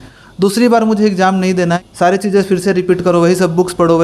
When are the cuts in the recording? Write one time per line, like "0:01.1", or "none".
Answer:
0:01.8